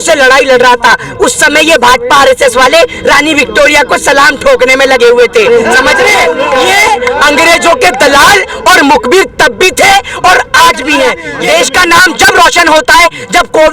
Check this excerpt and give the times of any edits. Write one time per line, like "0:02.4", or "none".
0:06.4
0:11.3